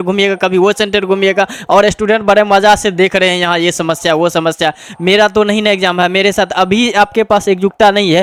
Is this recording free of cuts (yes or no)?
yes